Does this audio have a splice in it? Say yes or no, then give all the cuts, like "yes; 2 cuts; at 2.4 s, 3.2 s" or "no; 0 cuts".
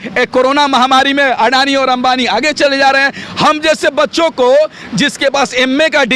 no; 0 cuts